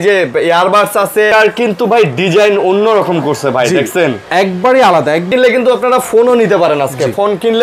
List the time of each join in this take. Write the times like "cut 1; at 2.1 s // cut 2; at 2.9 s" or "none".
cut 1; at 1.3 s // cut 2; at 5.3 s